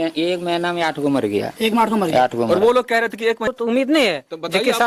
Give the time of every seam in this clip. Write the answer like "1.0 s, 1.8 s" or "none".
3.5 s